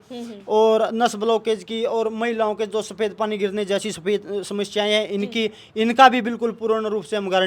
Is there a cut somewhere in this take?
no; 0 cuts

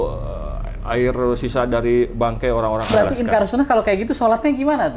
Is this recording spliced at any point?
yes; 1 cut; at 2.9 s

